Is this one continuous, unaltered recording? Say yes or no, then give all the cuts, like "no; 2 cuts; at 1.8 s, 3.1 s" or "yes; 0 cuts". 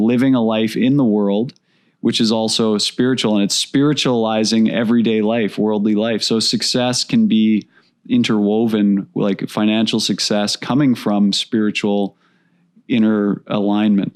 yes; 0 cuts